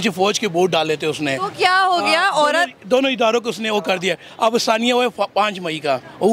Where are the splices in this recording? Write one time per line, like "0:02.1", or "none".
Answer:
none